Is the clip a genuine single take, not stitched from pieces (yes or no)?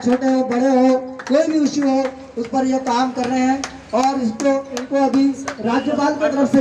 yes